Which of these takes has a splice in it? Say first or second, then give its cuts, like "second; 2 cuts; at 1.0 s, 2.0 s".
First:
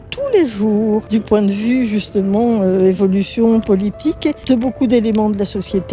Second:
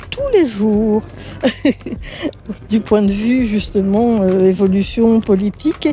first; 2 cuts; at 1.1 s, 4.4 s